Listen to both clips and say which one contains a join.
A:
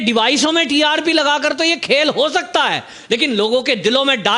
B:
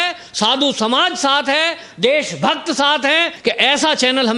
B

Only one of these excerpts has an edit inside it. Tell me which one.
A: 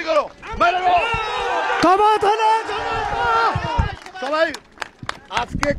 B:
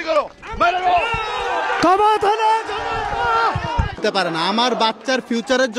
B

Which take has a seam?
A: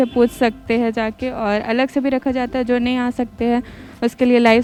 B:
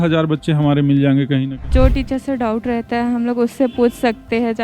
B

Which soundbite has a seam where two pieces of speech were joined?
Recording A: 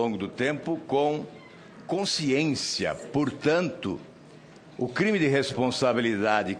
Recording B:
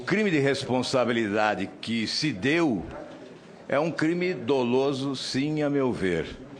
B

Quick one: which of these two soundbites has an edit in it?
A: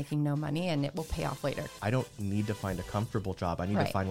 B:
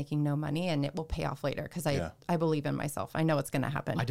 A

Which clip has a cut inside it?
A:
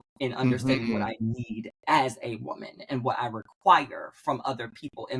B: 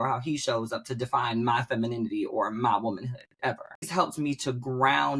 B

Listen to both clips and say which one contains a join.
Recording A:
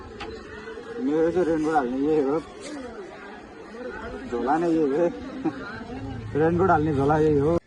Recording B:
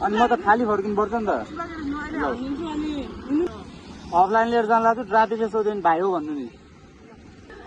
B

